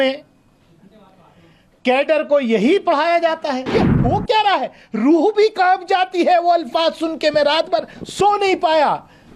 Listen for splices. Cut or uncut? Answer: cut